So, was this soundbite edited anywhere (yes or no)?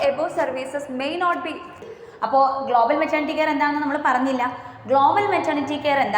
yes